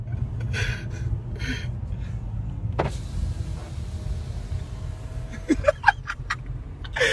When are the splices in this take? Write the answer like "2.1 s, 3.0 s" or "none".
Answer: 3.2 s